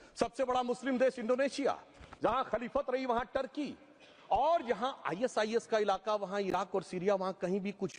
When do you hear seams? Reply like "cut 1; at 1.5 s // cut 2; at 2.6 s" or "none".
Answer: none